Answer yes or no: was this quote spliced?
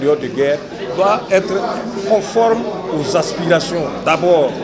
no